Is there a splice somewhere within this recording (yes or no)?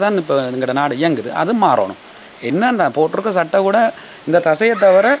no